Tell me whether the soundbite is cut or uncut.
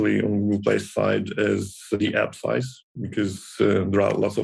cut